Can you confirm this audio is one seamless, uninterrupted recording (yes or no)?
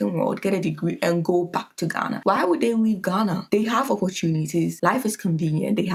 yes